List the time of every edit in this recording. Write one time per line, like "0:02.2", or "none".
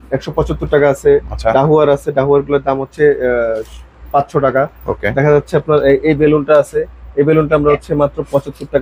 none